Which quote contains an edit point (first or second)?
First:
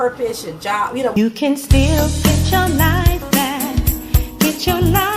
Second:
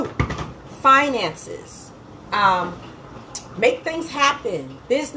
first